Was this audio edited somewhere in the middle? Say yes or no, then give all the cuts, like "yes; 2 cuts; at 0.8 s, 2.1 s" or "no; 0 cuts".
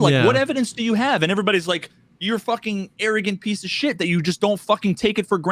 no; 0 cuts